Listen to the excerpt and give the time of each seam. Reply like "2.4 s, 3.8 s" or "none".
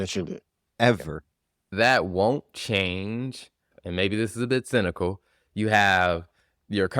1.7 s, 3.6 s